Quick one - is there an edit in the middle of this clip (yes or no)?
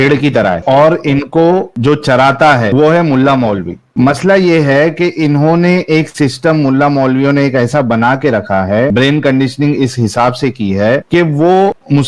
no